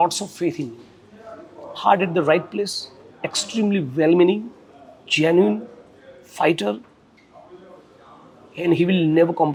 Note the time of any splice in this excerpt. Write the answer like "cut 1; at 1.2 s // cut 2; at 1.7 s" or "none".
none